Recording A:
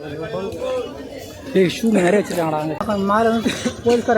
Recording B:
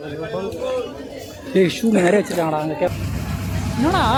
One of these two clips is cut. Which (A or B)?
A